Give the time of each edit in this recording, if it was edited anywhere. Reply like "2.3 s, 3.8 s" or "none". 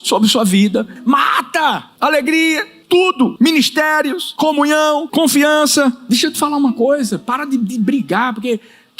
1.0 s, 1.9 s, 3.1 s, 4.2 s, 5.1 s, 6.0 s